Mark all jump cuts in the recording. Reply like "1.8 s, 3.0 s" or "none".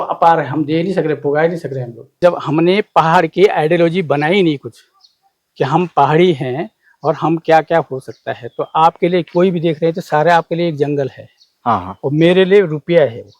2.0 s